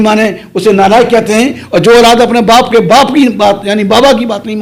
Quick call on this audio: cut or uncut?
uncut